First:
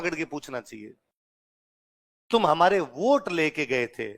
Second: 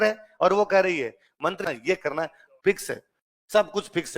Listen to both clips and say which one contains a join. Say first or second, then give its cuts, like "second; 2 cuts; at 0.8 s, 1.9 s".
second; 1 cut; at 1.6 s